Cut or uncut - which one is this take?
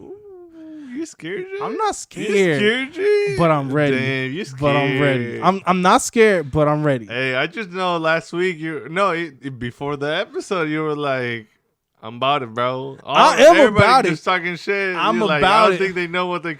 uncut